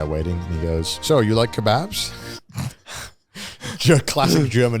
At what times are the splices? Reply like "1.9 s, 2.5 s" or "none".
0.9 s